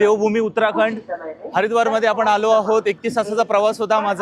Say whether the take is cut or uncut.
uncut